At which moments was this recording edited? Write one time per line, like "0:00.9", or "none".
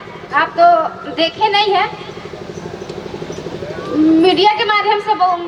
none